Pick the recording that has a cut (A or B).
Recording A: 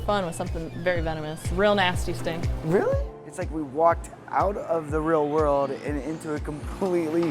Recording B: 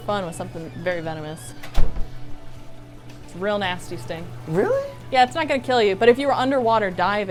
A